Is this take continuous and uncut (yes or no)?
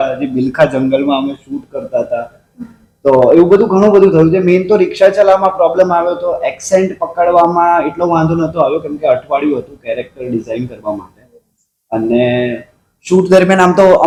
yes